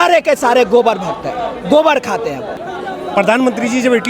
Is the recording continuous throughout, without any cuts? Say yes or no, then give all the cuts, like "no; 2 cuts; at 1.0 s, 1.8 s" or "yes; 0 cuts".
no; 1 cut; at 2.7 s